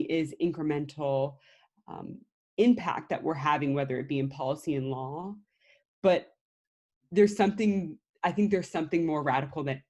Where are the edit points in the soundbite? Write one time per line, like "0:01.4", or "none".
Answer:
none